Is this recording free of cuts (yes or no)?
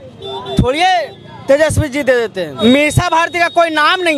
no